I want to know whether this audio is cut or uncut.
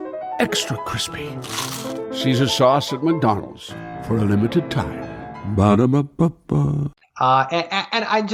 uncut